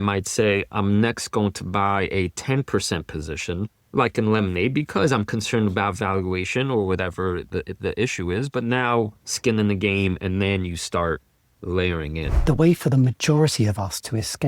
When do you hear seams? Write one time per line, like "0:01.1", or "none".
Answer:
0:03.8
0:12.3